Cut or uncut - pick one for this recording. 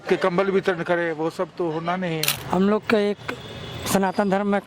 cut